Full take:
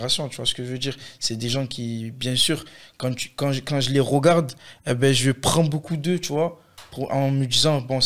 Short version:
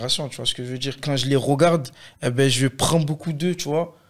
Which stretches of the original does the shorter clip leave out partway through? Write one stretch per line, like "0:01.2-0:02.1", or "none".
0:01.0-0:03.6